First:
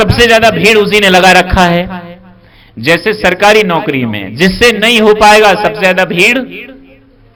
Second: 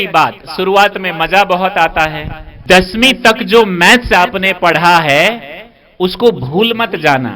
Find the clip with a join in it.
second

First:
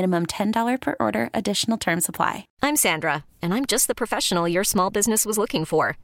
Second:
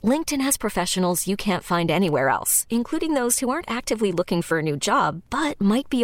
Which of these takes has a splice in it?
first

